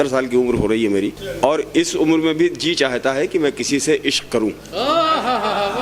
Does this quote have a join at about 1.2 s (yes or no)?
yes